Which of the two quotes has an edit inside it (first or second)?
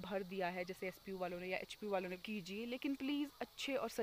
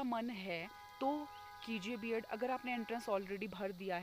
first